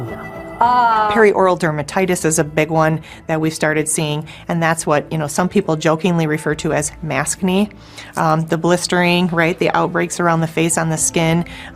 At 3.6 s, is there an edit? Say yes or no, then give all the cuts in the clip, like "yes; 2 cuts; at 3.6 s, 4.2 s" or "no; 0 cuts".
no; 1 cut; at 1.1 s